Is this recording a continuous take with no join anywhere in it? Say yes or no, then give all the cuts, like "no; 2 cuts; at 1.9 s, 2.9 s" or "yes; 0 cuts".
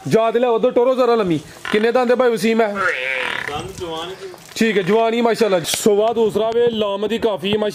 no; 1 cut; at 5.7 s